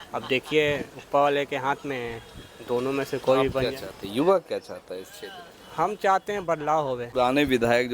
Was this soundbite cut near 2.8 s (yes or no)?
no